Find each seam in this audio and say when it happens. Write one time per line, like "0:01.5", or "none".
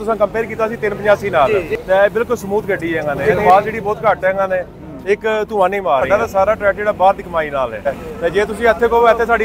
0:01.5
0:03.2
0:06.1
0:07.9